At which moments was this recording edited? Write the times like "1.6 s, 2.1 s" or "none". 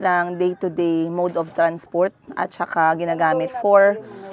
none

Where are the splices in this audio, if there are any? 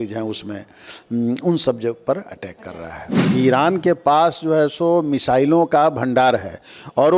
3.3 s

